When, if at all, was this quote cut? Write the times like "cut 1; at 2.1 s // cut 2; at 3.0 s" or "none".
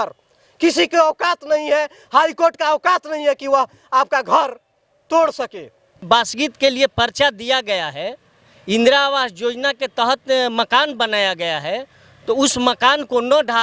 cut 1; at 6.0 s